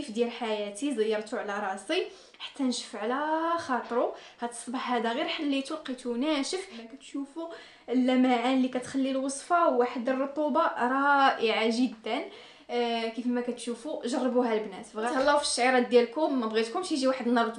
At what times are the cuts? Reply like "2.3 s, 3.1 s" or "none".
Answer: 6.8 s, 15.0 s